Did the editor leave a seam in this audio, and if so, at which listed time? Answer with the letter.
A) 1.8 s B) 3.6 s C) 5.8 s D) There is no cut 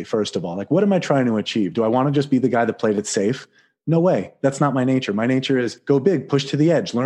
C